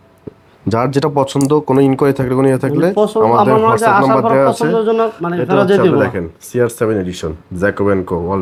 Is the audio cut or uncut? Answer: uncut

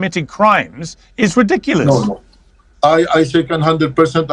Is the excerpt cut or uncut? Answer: uncut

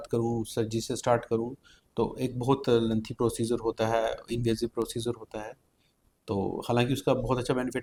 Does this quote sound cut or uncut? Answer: uncut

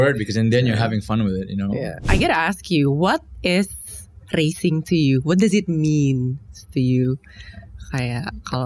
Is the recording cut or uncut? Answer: cut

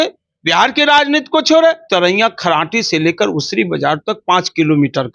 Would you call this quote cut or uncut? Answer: cut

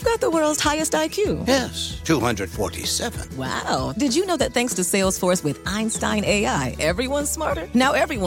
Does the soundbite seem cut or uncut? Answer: uncut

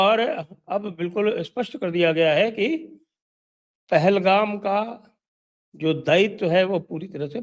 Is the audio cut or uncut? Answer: uncut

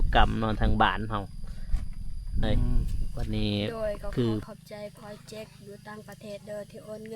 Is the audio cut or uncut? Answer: cut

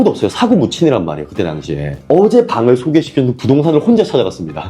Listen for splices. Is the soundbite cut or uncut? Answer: cut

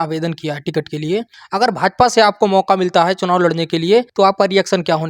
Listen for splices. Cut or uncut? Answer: cut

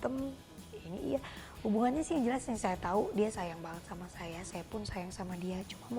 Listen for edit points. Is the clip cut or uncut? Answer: uncut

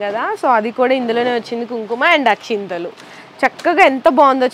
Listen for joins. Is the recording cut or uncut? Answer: uncut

